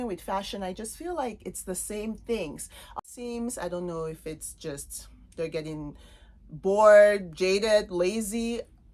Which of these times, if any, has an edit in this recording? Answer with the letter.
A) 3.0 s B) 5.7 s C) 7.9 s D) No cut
A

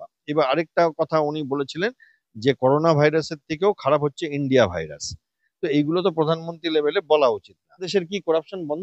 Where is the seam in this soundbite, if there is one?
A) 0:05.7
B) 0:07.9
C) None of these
B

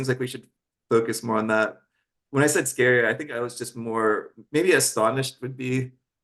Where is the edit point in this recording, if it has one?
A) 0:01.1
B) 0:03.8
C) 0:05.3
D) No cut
D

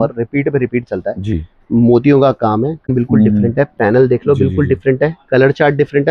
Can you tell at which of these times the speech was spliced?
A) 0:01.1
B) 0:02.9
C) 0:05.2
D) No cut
B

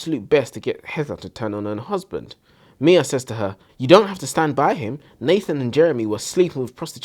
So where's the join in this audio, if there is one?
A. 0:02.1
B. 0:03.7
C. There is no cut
B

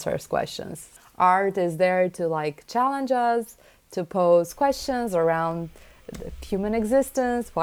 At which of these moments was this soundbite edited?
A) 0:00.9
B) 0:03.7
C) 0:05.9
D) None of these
A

